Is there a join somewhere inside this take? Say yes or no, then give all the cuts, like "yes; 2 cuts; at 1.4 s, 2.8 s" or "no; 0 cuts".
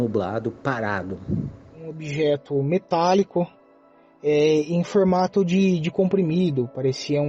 yes; 1 cut; at 2.0 s